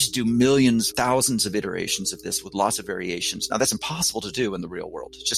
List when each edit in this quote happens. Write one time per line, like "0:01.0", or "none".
0:03.4